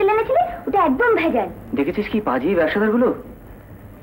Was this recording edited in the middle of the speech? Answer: yes; 1 cut; at 1.6 s

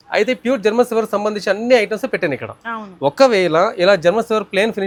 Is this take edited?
no; 0 cuts

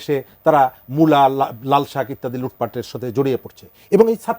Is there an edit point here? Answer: no; 0 cuts

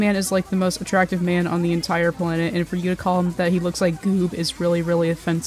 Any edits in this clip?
no; 0 cuts

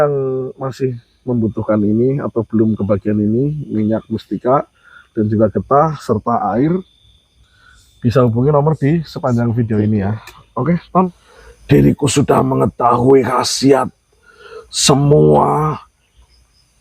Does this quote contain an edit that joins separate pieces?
yes; 1 cut; at 11.3 s

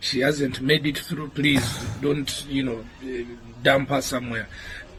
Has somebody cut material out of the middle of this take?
no; 0 cuts

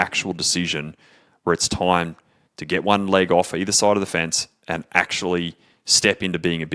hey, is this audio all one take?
yes; 0 cuts

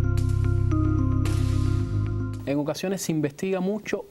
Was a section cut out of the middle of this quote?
yes; 1 cut; at 2.3 s

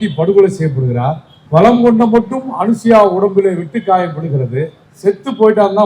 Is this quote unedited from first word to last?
no; 2 cuts; at 1.3 s, 4.8 s

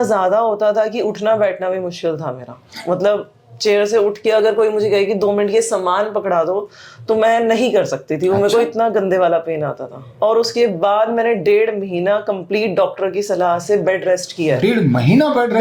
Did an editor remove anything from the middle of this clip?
no; 0 cuts

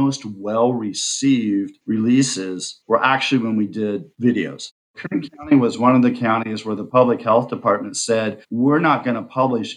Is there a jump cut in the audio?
yes; 1 cut; at 4.9 s

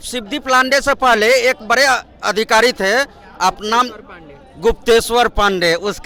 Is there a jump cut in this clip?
no; 0 cuts

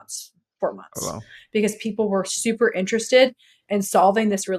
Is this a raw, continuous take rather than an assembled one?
yes; 0 cuts

